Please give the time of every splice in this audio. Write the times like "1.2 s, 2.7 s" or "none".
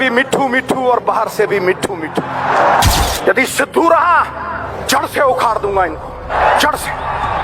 3.0 s, 4.7 s, 6.3 s